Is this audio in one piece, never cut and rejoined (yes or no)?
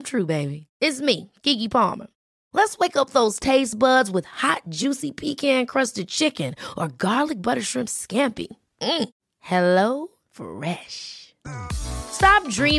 yes